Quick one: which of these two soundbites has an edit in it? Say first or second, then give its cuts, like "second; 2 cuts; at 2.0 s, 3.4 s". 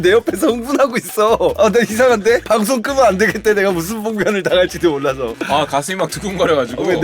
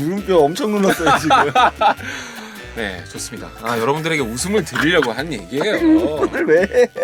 first; 1 cut; at 5.3 s